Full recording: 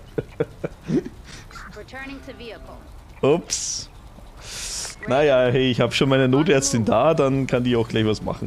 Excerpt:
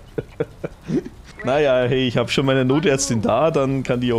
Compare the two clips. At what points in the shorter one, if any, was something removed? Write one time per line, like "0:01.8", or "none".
0:01.2

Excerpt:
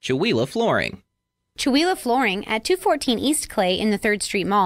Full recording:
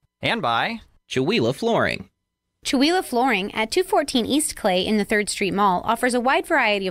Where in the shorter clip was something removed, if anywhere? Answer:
none

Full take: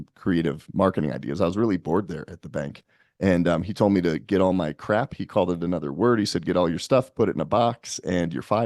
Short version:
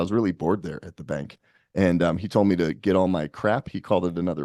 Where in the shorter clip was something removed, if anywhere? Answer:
none

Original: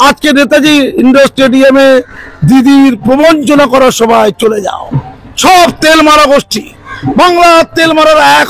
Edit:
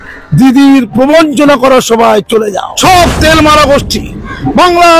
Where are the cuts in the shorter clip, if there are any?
0:02.6

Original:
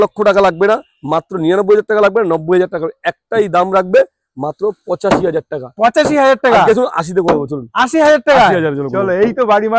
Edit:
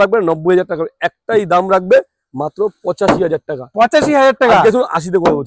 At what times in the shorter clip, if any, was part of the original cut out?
none

